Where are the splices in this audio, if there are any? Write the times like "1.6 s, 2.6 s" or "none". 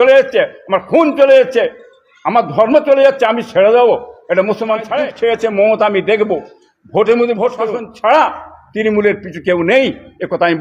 4.9 s, 7.8 s